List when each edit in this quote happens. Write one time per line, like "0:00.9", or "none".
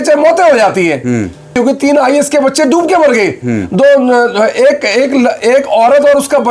0:01.5